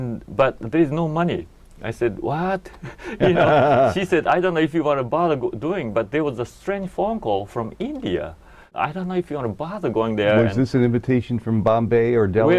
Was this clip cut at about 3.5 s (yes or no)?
no